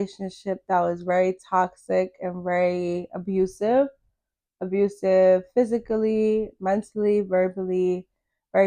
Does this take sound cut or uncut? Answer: uncut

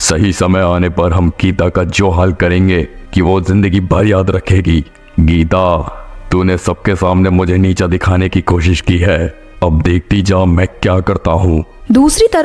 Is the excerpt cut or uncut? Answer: uncut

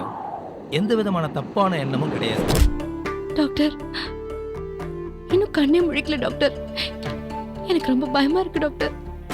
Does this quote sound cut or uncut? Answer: cut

